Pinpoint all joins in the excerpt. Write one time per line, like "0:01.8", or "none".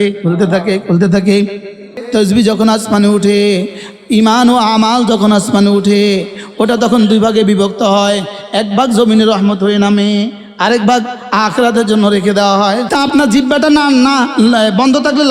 0:02.0
0:12.9